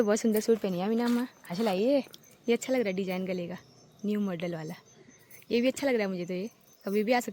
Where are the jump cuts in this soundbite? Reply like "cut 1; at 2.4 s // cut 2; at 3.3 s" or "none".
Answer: none